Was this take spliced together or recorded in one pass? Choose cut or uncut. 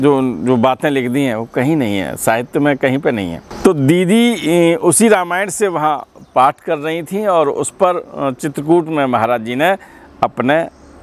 cut